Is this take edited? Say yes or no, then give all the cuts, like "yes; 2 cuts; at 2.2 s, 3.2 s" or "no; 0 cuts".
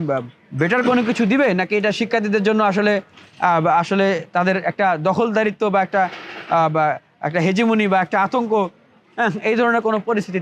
no; 0 cuts